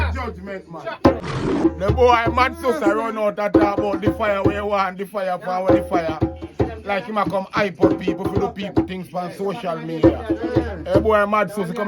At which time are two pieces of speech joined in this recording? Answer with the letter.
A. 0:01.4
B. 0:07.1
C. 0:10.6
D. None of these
A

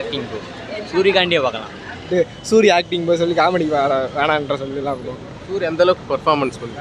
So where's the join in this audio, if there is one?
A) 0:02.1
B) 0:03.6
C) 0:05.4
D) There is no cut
A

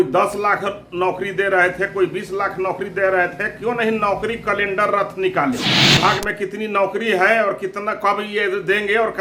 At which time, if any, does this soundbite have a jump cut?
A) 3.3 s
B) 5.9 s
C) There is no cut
B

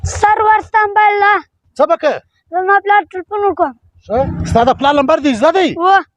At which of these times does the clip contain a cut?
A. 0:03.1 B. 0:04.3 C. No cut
B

